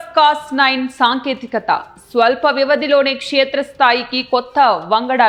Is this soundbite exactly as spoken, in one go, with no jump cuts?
yes; 0 cuts

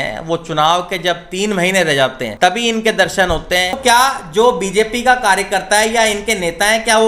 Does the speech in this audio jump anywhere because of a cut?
yes; 2 cuts; at 2.2 s, 3.8 s

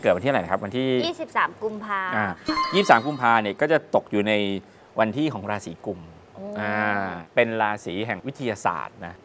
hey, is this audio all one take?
yes; 0 cuts

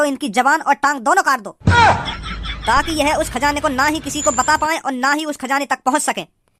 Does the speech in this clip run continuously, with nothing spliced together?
no; 1 cut; at 1.5 s

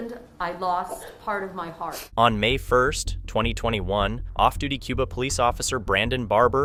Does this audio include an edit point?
no; 0 cuts

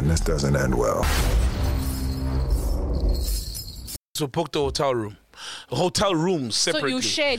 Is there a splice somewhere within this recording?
yes; 1 cut; at 4.2 s

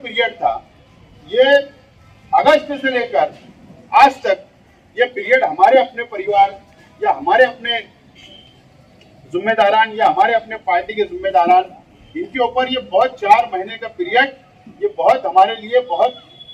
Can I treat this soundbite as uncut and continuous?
yes; 0 cuts

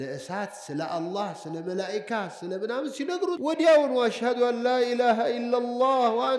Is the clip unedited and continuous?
no; 1 cut; at 3.4 s

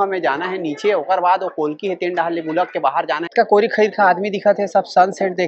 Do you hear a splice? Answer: yes; 1 cut; at 3.3 s

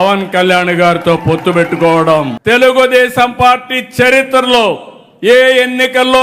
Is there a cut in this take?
yes; 1 cut; at 2.3 s

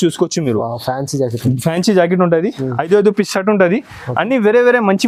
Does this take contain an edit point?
no; 0 cuts

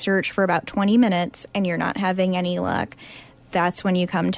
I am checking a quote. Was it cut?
no; 0 cuts

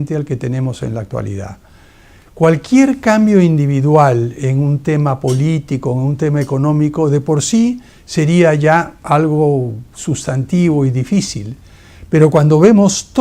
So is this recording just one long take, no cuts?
no; 1 cut; at 11.4 s

